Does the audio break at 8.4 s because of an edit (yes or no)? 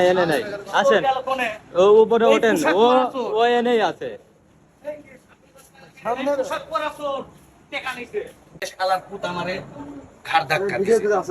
yes